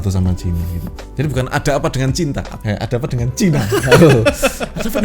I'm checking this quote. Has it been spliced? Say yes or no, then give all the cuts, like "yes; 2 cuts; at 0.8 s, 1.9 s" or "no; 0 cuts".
yes; 1 cut; at 2.5 s